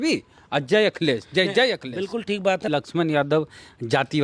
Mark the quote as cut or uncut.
cut